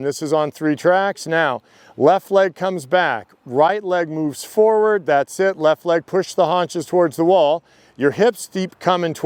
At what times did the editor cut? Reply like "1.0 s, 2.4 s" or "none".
none